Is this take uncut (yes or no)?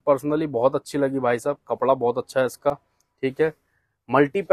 yes